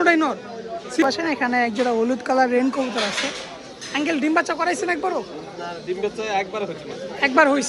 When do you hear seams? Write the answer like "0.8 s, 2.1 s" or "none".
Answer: 1.0 s